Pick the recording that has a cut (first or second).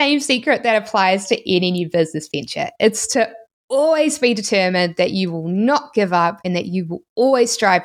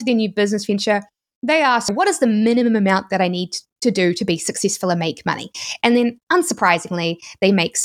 second